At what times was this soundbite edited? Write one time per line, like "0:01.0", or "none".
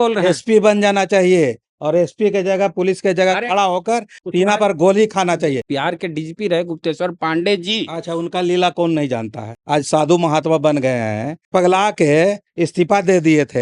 0:04.2
0:05.6
0:09.6
0:11.4